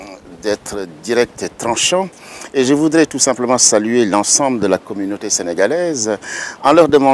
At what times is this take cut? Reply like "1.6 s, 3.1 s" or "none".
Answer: 2.7 s